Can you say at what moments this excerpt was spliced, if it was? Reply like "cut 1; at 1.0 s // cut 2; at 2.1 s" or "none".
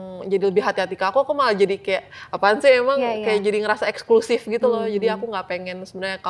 none